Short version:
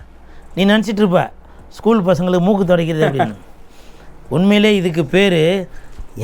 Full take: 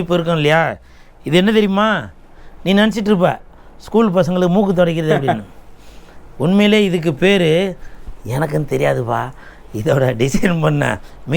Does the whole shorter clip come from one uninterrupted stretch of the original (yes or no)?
yes